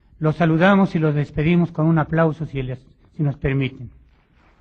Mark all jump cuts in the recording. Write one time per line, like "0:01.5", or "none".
0:01.1